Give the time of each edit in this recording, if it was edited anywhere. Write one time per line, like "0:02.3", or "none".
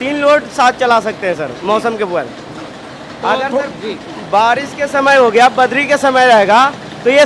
none

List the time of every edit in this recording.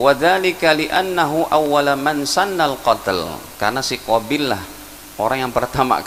none

